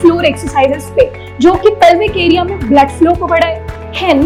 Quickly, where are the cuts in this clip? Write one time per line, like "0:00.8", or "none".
none